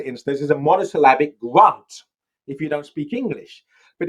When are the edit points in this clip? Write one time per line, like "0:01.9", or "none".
none